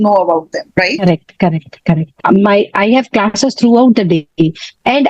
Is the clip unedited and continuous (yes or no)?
no